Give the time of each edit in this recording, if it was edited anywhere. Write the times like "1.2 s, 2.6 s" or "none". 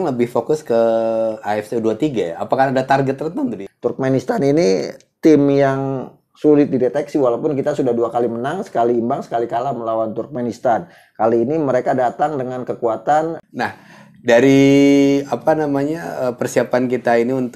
3.6 s, 13.4 s